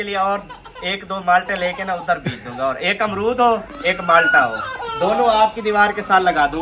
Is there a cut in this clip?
no; 0 cuts

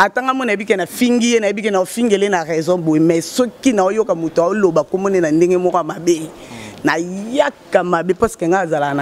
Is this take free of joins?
yes; 0 cuts

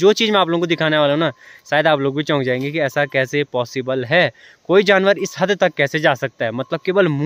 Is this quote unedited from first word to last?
yes; 0 cuts

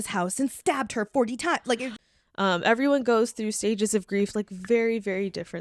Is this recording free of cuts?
no; 1 cut; at 1.9 s

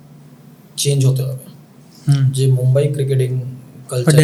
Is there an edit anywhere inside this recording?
no; 0 cuts

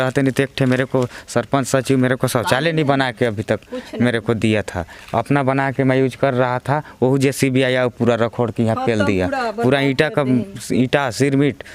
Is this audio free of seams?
yes; 0 cuts

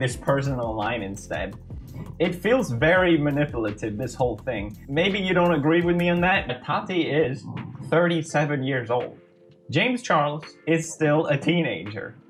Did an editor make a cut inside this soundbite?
no; 0 cuts

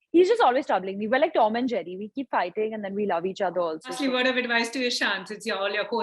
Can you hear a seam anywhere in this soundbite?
yes; 1 cut; at 4.0 s

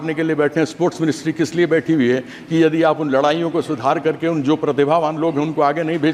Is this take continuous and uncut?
yes; 0 cuts

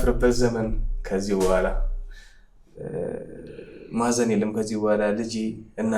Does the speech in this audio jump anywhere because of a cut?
no; 0 cuts

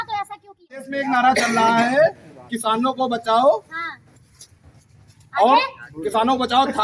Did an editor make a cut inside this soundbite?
yes; 1 cut; at 0.9 s

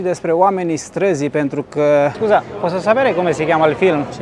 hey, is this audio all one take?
no; 1 cut; at 2.2 s

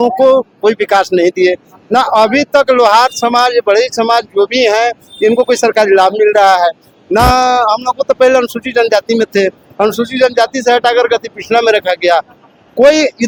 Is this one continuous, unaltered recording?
yes; 0 cuts

